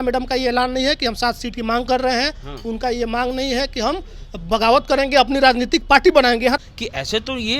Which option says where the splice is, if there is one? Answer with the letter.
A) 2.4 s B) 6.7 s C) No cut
B